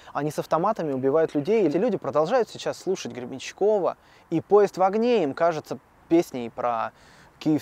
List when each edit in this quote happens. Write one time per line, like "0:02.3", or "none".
0:01.7

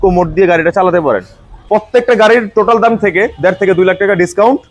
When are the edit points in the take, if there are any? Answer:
0:01.5

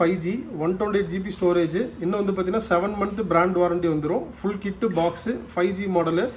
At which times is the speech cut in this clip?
none

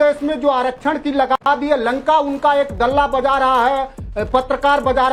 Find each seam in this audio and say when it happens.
none

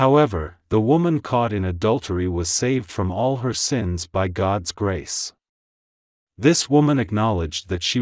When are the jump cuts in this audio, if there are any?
none

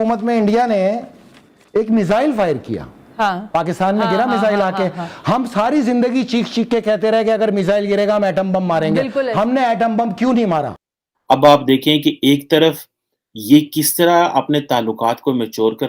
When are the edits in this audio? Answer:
0:10.8

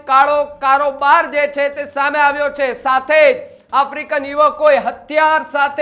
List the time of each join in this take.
none

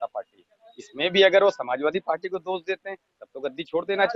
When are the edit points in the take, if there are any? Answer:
none

